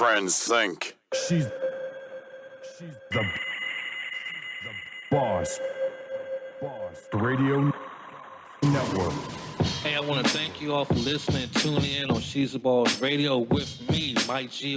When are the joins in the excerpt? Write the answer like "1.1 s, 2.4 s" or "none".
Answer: 0.9 s, 9.4 s